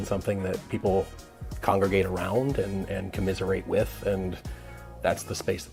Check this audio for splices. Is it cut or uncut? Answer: uncut